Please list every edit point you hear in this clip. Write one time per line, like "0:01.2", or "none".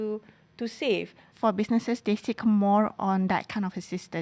0:01.3